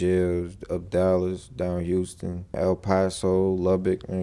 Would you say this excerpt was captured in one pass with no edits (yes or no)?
yes